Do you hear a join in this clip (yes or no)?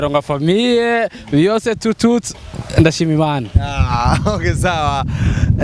no